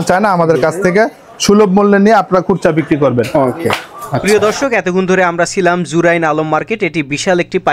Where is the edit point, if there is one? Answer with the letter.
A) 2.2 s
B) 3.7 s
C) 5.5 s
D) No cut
D